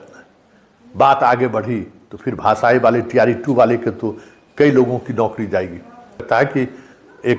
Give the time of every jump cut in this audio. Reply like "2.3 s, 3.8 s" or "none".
6.2 s